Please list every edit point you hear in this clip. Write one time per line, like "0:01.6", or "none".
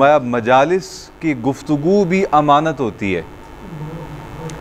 none

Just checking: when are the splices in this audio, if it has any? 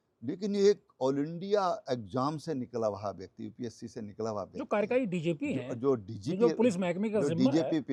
none

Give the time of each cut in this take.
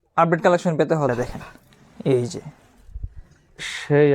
0:01.1

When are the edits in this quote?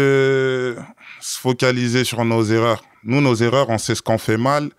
none

